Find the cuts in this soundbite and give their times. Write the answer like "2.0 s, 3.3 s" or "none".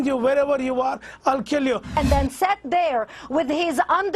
2.0 s